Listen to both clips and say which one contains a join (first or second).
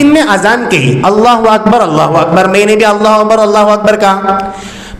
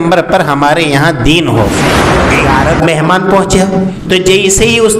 second